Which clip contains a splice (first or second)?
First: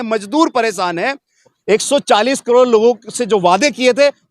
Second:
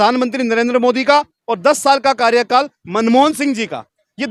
first